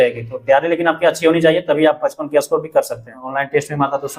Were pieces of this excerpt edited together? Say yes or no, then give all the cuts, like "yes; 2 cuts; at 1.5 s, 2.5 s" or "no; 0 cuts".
yes; 1 cut; at 3.3 s